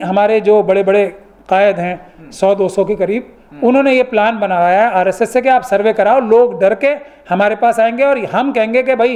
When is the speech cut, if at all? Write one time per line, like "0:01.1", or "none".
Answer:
none